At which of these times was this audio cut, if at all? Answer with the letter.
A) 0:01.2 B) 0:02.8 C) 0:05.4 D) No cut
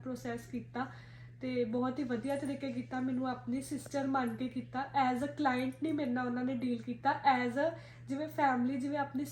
D